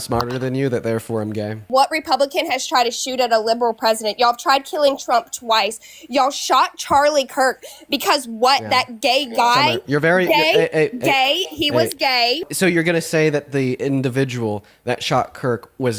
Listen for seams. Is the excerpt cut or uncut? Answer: cut